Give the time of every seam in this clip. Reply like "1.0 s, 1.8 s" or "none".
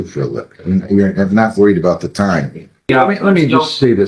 2.9 s

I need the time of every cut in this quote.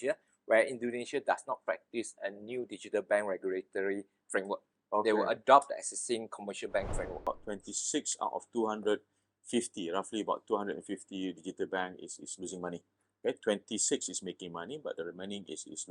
7.2 s

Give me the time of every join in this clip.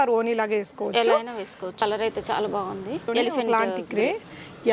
1.8 s, 3.1 s

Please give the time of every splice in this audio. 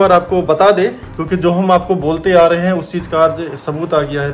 1.0 s

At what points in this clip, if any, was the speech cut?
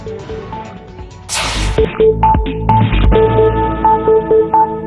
1.0 s

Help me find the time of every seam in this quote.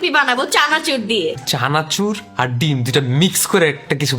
1.4 s

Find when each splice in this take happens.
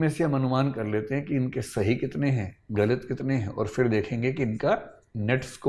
none

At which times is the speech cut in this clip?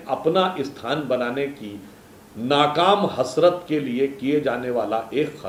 none

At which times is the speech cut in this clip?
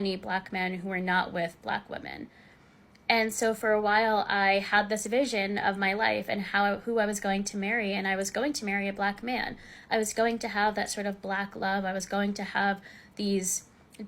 6.6 s

